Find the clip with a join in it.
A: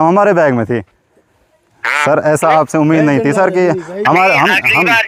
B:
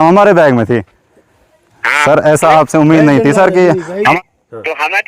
B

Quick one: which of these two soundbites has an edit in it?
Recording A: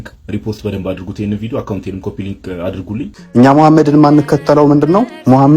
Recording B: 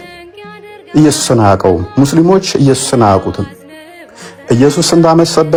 A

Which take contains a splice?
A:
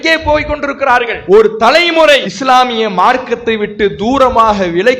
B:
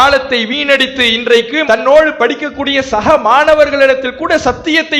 A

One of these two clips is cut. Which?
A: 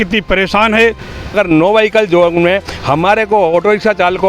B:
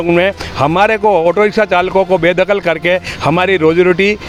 A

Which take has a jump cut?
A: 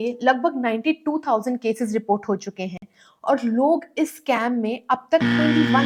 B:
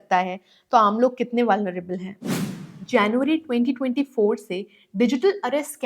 B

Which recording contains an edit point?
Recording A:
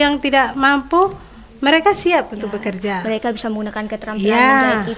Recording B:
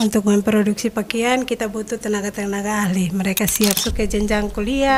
B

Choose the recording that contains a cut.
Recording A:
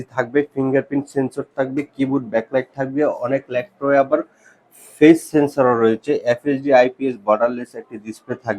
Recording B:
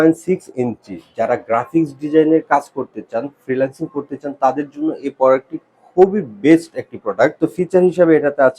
B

